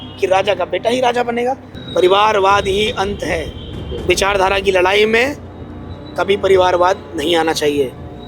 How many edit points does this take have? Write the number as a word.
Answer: one